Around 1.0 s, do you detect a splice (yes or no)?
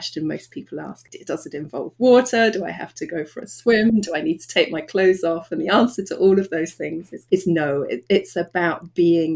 yes